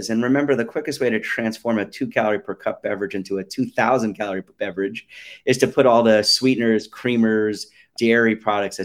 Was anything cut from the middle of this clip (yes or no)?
yes